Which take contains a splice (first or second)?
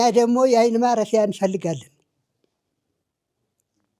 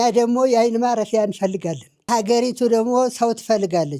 second